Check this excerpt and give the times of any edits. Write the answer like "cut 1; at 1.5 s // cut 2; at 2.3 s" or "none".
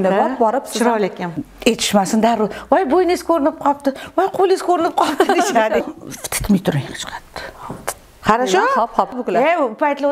cut 1; at 1.3 s // cut 2; at 5.8 s // cut 3; at 9.2 s